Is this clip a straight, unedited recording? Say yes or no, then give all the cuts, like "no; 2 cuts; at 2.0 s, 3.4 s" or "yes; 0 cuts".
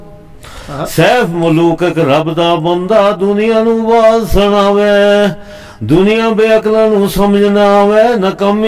yes; 0 cuts